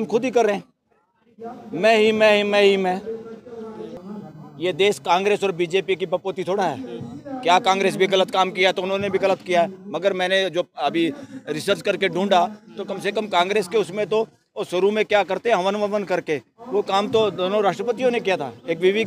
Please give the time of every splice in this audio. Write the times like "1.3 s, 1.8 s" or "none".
4.0 s